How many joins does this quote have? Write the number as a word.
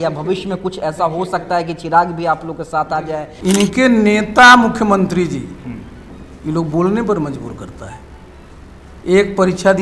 one